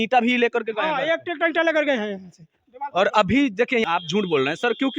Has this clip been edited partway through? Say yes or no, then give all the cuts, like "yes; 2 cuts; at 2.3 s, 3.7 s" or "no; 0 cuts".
yes; 1 cut; at 3.8 s